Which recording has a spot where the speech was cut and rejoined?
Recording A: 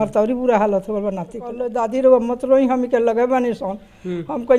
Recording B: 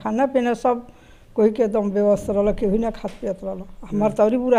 A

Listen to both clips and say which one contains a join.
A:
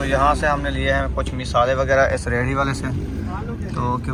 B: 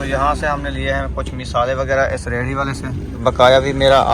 B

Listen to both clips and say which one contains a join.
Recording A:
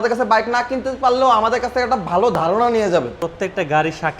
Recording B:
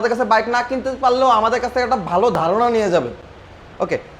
A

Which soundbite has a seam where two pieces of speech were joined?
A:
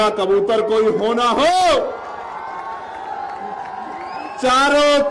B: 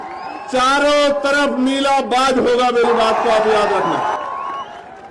B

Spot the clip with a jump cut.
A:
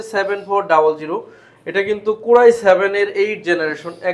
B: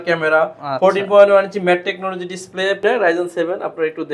B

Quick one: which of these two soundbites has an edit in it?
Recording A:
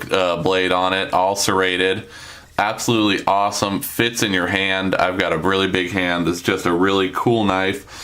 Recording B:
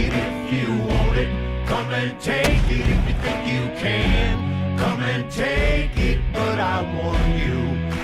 A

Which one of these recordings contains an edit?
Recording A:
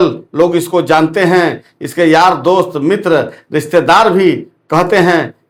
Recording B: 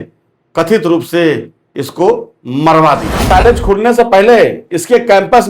B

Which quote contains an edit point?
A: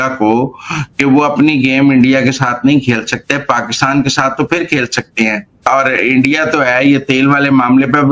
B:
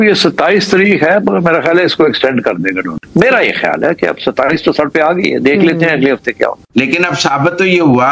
B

